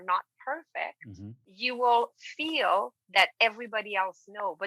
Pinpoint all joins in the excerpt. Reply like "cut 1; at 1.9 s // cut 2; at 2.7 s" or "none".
cut 1; at 1.5 s